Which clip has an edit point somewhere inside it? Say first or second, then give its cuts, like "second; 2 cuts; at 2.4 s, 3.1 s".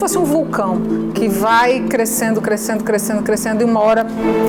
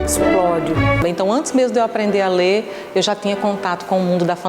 second; 1 cut; at 1.0 s